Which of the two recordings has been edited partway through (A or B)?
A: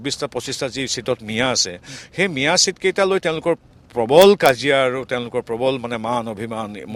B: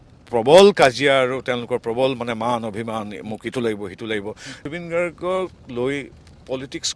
B